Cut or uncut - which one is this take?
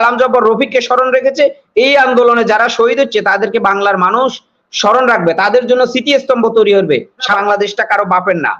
cut